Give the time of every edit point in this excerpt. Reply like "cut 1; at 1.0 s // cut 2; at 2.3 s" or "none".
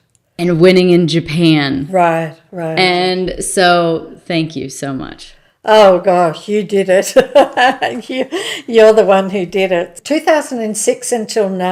cut 1; at 10.0 s